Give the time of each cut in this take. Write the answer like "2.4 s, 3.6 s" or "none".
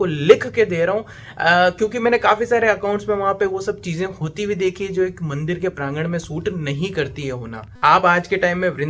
none